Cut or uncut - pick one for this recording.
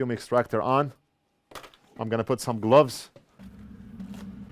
cut